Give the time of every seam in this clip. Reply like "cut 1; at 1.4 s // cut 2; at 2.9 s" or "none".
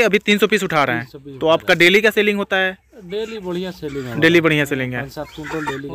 none